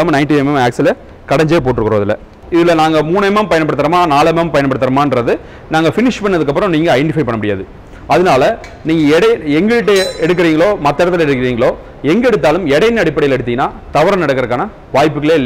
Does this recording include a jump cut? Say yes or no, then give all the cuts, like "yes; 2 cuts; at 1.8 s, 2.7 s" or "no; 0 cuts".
yes; 1 cut; at 2.4 s